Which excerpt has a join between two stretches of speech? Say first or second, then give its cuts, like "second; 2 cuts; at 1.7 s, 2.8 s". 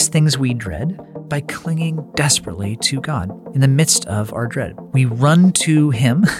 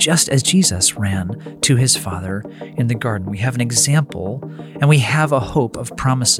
first; 3 cuts; at 1.1 s, 3.4 s, 4.8 s